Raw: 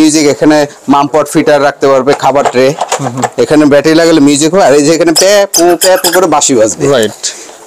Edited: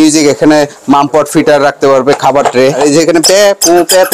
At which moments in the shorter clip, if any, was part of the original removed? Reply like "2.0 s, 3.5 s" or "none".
2.8 s